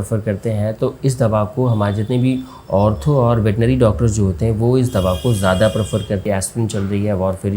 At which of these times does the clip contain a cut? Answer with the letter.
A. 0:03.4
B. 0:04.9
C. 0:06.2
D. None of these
C